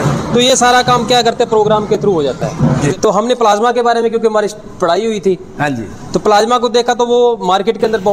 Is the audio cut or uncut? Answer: cut